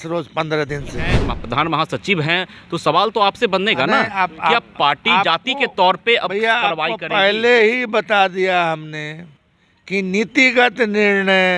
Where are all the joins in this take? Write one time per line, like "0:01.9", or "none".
0:01.3